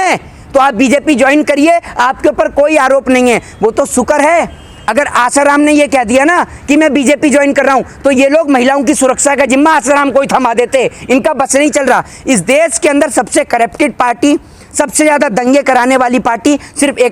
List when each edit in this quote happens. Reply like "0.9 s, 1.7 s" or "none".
none